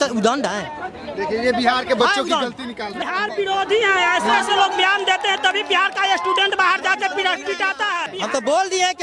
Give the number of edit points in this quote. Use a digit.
2